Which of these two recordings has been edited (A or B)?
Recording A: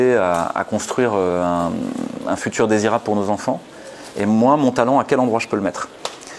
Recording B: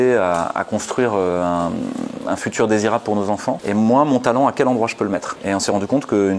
B